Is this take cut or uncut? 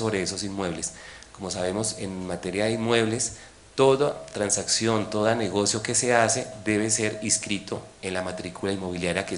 uncut